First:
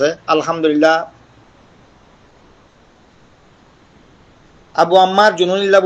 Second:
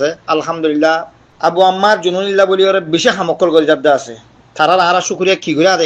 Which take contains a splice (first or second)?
second